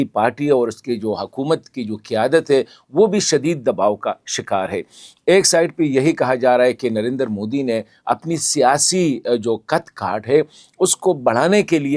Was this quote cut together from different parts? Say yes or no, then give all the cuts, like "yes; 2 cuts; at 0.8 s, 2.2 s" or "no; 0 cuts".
no; 0 cuts